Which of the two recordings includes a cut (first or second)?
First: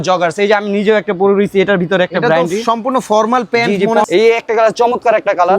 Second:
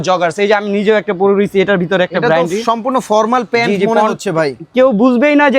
first